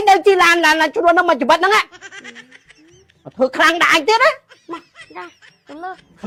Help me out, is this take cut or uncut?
uncut